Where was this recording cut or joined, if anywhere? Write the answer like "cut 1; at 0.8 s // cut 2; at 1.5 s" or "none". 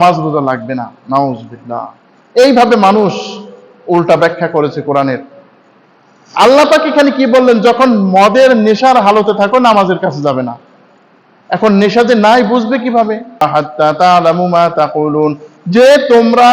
cut 1; at 13.4 s